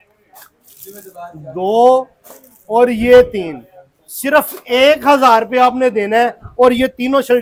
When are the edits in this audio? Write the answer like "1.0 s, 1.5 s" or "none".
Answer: none

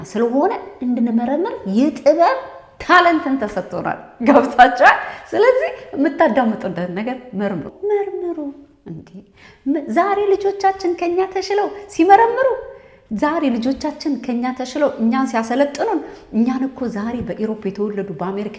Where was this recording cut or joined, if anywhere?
7.7 s

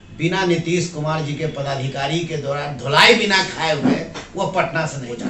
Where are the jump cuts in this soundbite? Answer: none

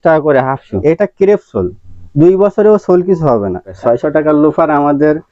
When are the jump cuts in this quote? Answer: 0.8 s, 3.7 s

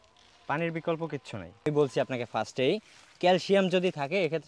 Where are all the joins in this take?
1.7 s

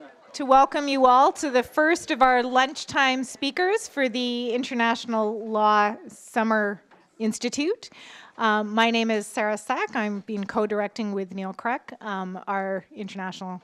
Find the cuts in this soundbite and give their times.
none

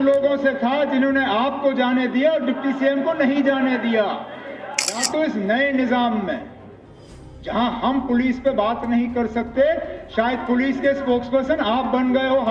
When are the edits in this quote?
5.0 s

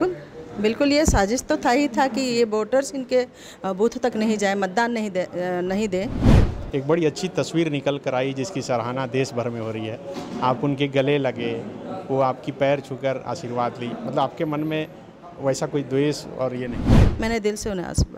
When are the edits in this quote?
6.3 s, 16.7 s

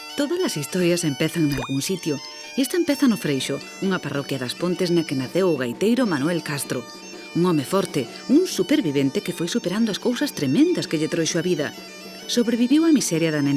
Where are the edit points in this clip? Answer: 5.7 s

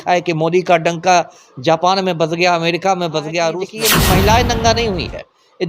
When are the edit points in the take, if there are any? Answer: 3.7 s

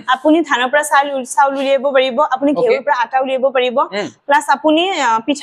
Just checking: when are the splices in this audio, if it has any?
none

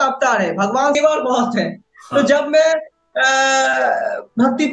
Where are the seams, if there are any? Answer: 1.0 s

